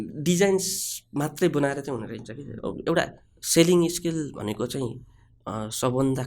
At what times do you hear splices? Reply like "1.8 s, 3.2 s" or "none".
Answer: 2.4 s